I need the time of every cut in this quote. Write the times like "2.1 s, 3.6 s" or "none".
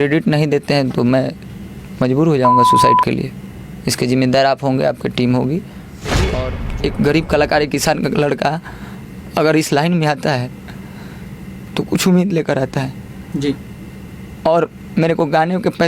6.3 s